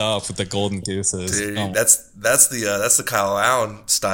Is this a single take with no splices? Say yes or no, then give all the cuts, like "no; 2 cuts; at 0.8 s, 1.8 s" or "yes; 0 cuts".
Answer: yes; 0 cuts